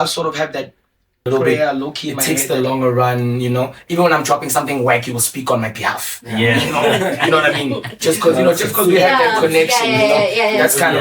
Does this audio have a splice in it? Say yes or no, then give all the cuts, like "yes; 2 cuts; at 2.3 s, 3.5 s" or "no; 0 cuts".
yes; 1 cut; at 2.2 s